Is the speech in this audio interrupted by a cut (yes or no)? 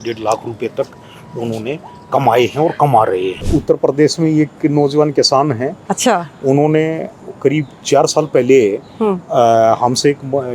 yes